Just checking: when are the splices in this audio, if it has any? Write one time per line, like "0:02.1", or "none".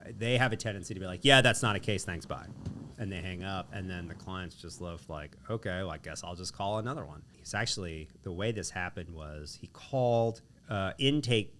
0:07.3
0:10.5